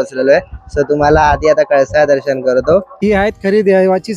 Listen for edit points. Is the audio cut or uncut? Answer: cut